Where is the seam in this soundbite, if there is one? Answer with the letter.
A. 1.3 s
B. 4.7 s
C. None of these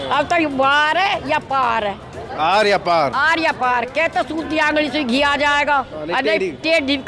C